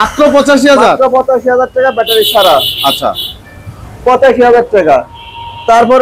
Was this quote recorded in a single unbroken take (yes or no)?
yes